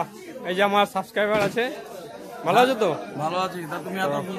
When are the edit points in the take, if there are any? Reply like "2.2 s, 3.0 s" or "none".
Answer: none

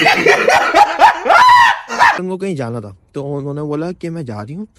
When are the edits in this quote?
2.2 s

